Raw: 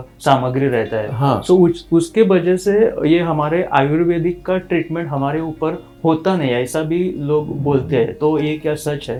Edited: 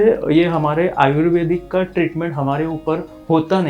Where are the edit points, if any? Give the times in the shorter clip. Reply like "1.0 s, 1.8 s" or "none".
none